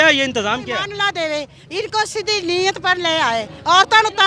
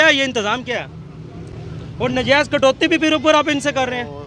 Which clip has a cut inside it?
first; 1 cut; at 0.9 s

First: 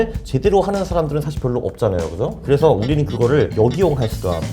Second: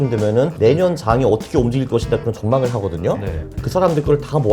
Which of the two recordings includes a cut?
second; 1 cut; at 3.5 s

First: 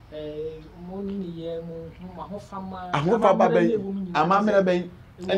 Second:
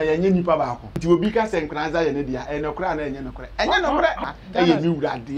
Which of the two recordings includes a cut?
second; 2 cuts; at 0.9 s, 4.2 s

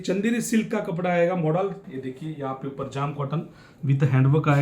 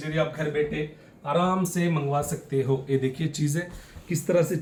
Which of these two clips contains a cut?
first; 1 cut; at 1.8 s

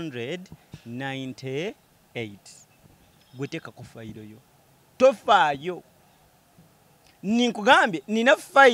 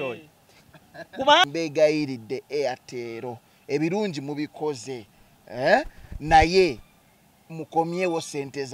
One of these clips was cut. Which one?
second; 1 cut; at 1.4 s

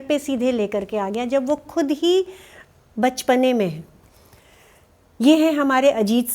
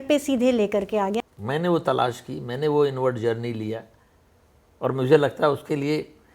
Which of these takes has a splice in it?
second; 1 cut; at 1.2 s

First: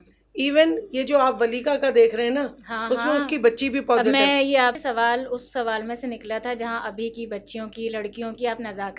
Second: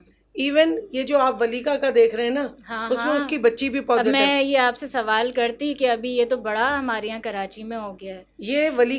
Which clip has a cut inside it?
first; 1 cut; at 4.8 s

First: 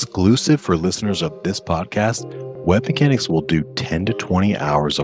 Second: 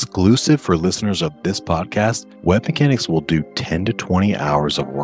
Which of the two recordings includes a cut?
second; 1 cut; at 2.3 s

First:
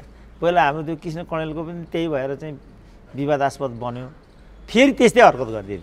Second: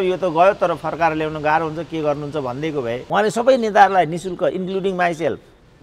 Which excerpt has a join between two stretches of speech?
second; 1 cut; at 3.0 s

